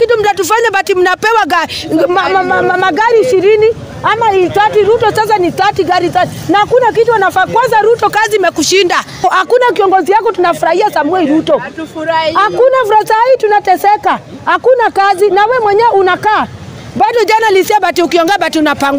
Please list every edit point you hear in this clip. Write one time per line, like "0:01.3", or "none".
0:09.2